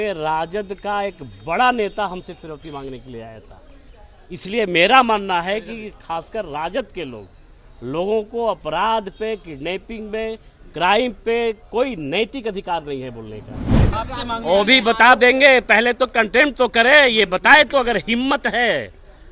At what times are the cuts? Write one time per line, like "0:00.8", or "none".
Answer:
0:13.8